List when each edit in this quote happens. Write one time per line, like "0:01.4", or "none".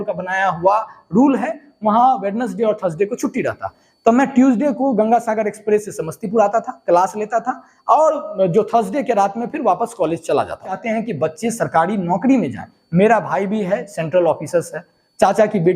0:10.7